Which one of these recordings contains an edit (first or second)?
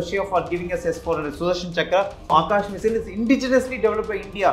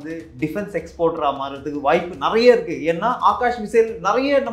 first